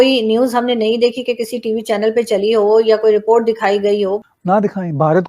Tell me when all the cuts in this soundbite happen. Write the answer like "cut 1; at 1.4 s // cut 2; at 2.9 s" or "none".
cut 1; at 4.2 s

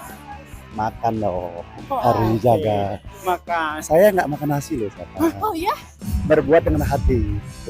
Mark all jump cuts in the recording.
cut 1; at 6.0 s

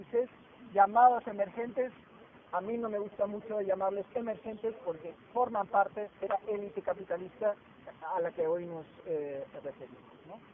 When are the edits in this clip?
cut 1; at 4.1 s

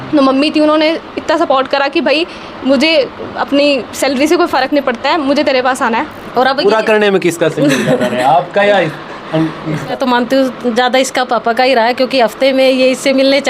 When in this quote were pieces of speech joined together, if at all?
cut 1; at 6.2 s // cut 2; at 9.9 s

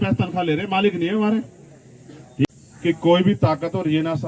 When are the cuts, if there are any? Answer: cut 1; at 2.5 s

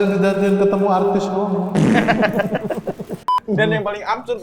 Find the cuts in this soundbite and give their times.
cut 1; at 3.4 s

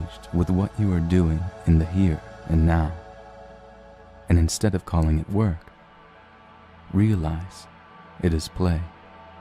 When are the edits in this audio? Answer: cut 1; at 1.1 s

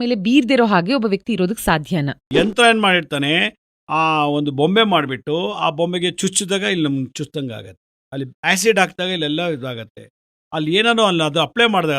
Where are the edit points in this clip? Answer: cut 1; at 2.3 s

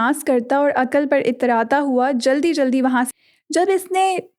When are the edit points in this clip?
cut 1; at 3.1 s

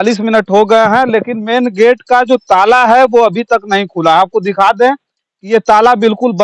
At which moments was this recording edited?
none

